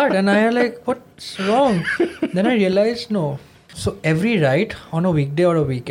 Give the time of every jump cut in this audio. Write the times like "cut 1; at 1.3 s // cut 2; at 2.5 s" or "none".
cut 1; at 3.7 s